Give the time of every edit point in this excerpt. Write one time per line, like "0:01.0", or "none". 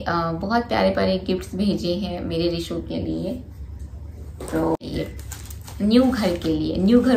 0:04.8